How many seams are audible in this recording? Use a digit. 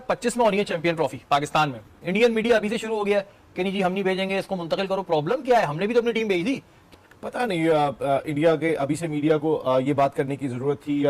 1